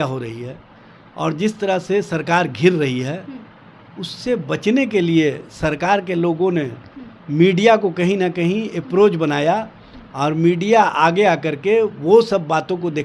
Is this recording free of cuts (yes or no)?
yes